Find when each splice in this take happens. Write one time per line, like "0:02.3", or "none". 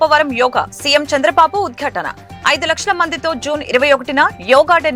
none